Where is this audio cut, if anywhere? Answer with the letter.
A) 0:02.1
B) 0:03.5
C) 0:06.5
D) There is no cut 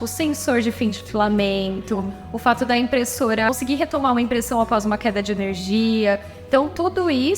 B